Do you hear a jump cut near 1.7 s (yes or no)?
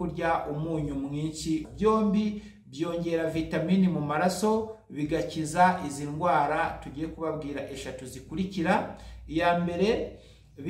yes